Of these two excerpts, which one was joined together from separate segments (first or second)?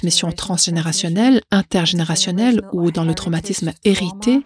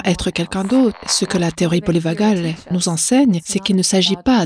second